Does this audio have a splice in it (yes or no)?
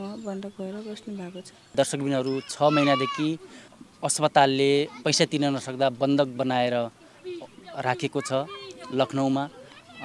yes